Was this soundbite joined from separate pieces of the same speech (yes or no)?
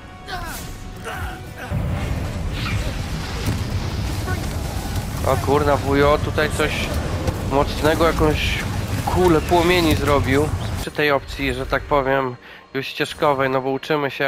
yes